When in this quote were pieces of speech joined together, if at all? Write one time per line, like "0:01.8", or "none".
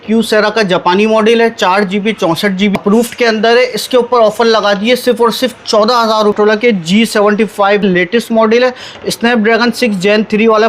0:02.8
0:06.3
0:07.8